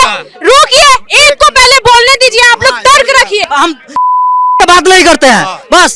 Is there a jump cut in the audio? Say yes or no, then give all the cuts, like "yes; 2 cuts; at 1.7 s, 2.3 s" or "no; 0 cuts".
yes; 1 cut; at 3.4 s